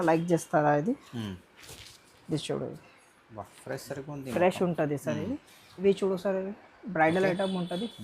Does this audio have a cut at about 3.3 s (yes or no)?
no